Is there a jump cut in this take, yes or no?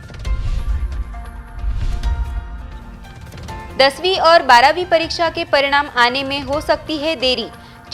no